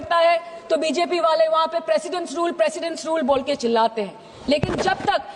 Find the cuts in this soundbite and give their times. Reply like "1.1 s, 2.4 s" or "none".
none